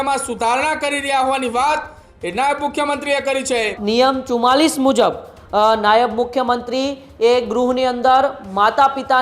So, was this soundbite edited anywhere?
yes; 1 cut; at 3.8 s

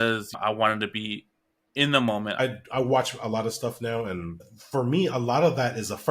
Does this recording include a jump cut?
yes; 2 cuts; at 2.3 s, 4.4 s

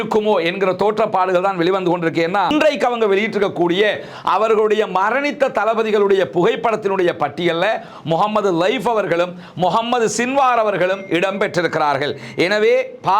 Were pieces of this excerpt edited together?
yes; 1 cut; at 2.5 s

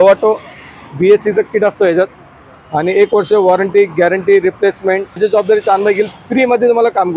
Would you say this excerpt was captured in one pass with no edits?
no; 1 cut; at 5.2 s

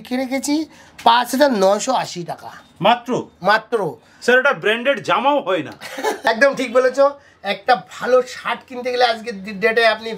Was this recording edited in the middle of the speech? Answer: no; 0 cuts

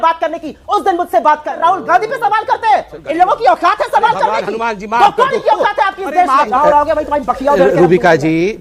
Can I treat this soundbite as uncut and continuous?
no; 2 cuts; at 1.5 s, 6.5 s

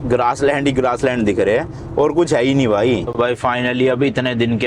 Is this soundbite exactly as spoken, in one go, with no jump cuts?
no; 1 cut; at 3.1 s

